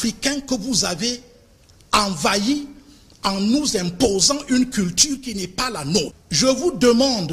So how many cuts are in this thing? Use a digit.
1